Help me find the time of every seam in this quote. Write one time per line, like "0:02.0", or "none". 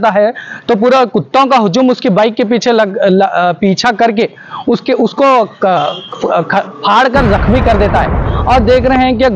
none